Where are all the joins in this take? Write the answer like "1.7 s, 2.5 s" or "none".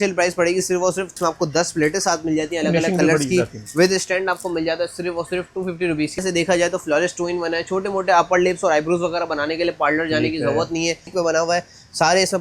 1.1 s, 6.2 s, 11.1 s